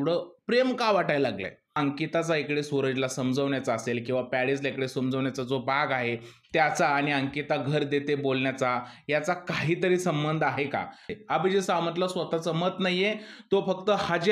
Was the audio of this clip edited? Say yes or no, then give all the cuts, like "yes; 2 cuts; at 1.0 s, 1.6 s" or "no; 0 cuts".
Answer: yes; 2 cuts; at 1.7 s, 11.1 s